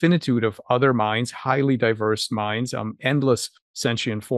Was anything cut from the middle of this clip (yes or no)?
no